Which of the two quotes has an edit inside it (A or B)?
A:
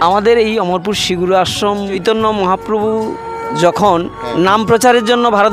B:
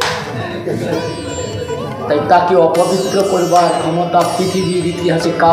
A